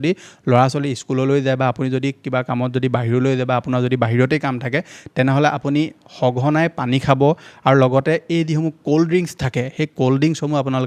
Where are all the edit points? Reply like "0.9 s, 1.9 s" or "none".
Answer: none